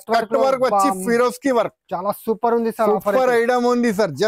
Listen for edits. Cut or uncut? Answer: uncut